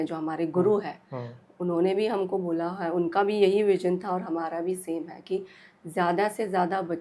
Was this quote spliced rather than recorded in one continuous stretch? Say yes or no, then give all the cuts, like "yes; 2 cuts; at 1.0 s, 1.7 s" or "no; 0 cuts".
no; 0 cuts